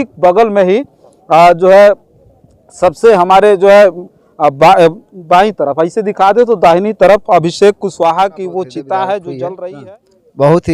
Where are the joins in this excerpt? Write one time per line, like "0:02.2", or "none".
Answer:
0:09.7